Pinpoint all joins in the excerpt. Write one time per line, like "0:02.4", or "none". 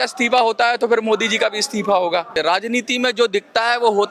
0:02.3